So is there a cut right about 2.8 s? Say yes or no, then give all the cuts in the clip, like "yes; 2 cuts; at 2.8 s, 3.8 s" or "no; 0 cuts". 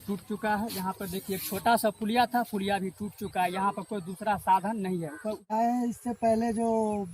no; 1 cut; at 5.5 s